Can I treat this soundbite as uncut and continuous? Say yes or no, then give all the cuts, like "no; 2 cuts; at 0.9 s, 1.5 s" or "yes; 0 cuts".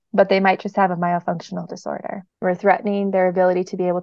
no; 1 cut; at 2.2 s